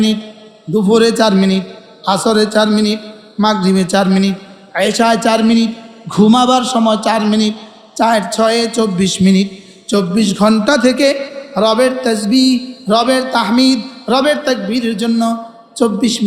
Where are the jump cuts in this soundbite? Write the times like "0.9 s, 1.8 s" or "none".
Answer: none